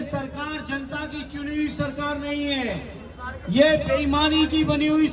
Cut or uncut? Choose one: uncut